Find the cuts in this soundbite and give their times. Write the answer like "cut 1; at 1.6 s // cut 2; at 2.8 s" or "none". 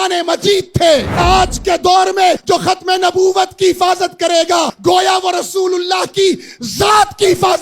cut 1; at 1.2 s // cut 2; at 2.4 s // cut 3; at 4.7 s

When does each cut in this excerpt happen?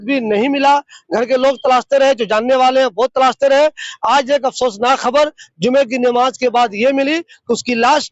none

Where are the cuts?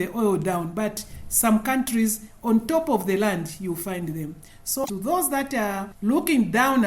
cut 1; at 4.8 s // cut 2; at 5.9 s

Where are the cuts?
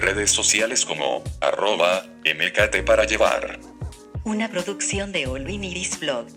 none

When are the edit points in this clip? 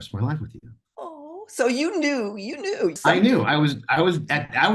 cut 1; at 3.0 s

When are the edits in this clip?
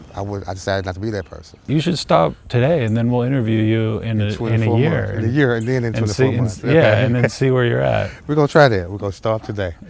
cut 1; at 1.5 s

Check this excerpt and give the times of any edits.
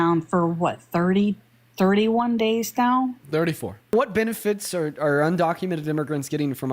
cut 1; at 3.9 s

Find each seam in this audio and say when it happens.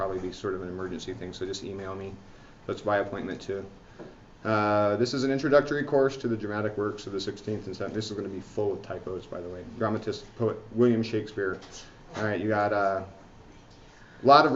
cut 1; at 2.2 s

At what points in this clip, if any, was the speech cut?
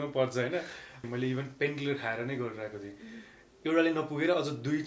cut 1; at 1.1 s

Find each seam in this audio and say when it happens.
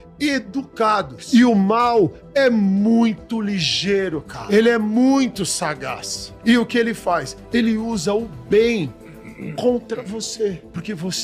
cut 1; at 1.2 s // cut 2; at 4.3 s

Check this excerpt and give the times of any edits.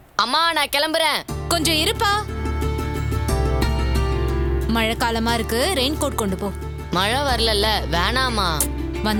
none

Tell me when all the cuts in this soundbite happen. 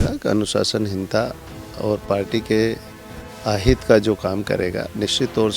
none

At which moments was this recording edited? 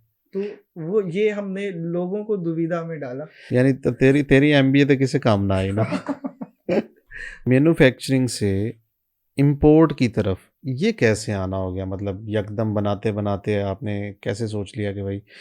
cut 1; at 3.3 s // cut 2; at 7.5 s

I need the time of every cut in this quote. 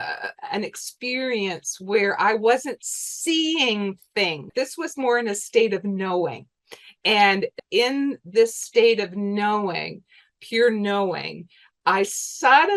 cut 1; at 4.5 s // cut 2; at 7.6 s

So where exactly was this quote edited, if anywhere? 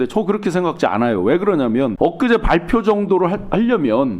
cut 1; at 1.9 s

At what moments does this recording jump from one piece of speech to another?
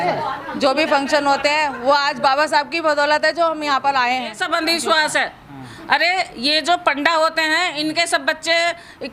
cut 1; at 4.4 s

